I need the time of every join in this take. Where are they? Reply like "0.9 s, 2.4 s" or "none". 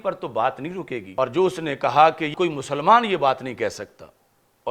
1.1 s, 2.3 s